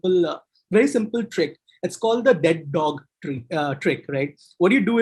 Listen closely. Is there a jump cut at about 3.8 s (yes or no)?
no